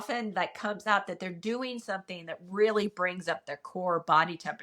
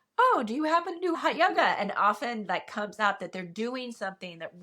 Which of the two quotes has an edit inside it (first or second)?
second